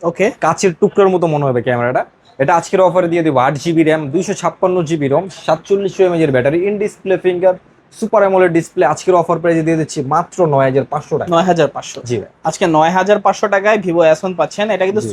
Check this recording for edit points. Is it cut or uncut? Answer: uncut